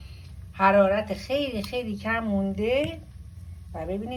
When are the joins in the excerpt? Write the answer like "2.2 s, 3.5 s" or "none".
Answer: none